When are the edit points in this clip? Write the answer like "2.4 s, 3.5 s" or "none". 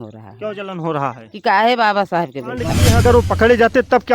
2.8 s